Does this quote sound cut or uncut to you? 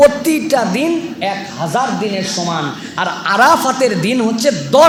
uncut